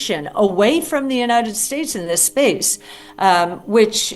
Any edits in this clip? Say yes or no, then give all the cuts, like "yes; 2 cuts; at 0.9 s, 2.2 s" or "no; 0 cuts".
no; 0 cuts